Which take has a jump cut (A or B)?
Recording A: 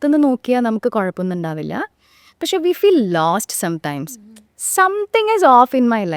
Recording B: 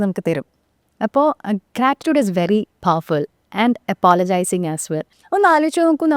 B